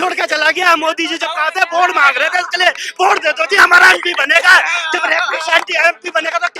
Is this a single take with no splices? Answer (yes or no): yes